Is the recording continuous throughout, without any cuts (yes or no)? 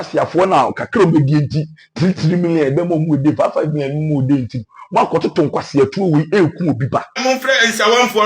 no